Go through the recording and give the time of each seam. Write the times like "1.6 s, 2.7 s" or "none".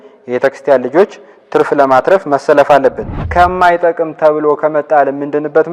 3.1 s